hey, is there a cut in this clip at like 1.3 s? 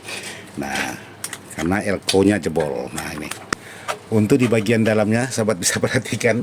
no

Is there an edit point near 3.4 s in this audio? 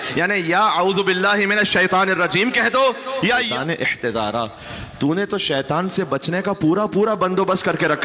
yes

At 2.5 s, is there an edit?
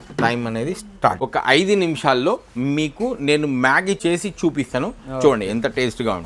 no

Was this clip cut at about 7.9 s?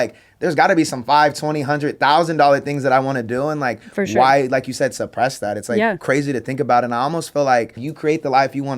yes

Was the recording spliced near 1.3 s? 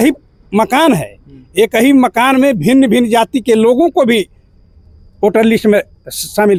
no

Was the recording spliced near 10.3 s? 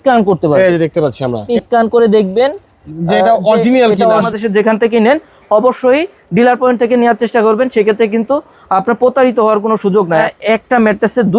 yes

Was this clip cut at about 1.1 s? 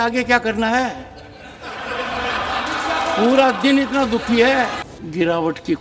no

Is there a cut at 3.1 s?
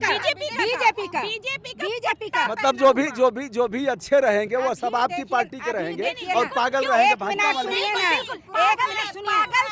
no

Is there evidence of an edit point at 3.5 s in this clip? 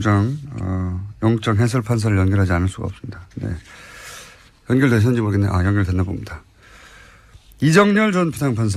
no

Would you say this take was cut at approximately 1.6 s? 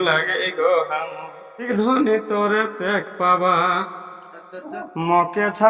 yes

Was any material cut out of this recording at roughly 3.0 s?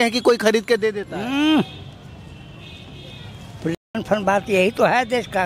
no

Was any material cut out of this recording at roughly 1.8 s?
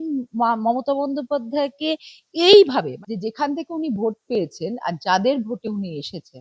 no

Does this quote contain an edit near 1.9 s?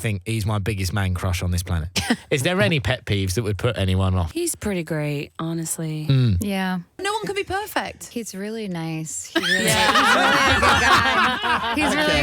yes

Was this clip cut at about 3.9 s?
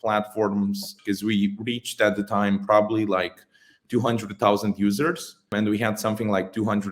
no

